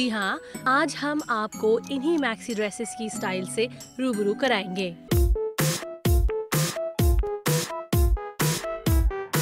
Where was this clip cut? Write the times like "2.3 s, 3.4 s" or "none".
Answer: 5.0 s